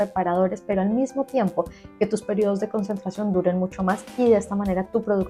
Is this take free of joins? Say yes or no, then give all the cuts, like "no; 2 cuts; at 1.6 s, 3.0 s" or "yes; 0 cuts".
yes; 0 cuts